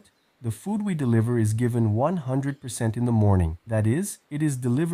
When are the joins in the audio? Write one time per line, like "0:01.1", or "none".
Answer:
0:03.9